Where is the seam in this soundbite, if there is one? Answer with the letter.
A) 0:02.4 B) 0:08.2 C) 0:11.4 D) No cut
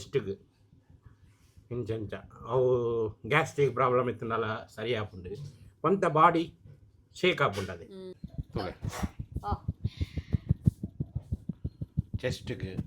B